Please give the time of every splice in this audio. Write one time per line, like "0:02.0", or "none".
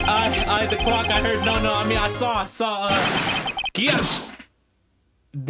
none